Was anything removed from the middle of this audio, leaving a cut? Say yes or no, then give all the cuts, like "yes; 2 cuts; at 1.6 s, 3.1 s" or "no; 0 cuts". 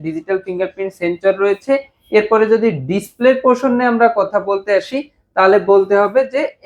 no; 0 cuts